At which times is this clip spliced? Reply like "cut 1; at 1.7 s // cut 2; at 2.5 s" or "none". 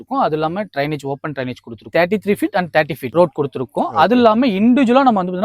cut 1; at 1.9 s